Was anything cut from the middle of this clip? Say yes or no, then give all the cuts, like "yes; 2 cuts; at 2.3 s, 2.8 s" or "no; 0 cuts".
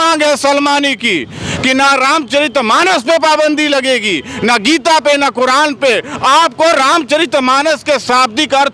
no; 0 cuts